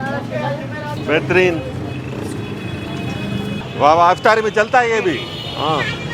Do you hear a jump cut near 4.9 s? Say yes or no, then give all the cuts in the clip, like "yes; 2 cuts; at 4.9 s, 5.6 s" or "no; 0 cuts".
no; 2 cuts; at 1.0 s, 3.6 s